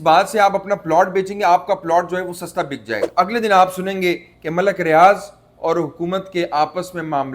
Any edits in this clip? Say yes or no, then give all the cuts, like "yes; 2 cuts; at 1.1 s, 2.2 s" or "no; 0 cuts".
yes; 1 cut; at 3.1 s